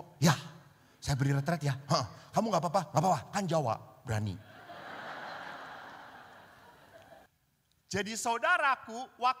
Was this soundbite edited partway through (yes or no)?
yes